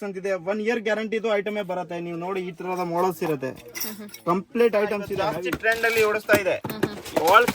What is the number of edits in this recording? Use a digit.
1